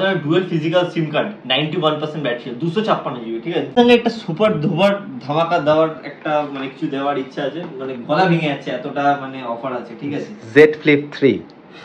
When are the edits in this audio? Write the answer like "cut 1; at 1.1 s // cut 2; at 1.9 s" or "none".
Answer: cut 1; at 3.8 s